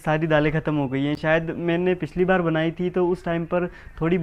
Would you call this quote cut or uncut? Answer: uncut